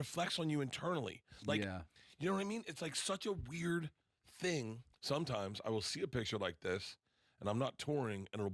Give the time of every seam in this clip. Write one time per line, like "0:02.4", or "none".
0:04.9